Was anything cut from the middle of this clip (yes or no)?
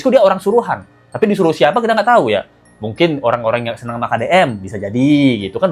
no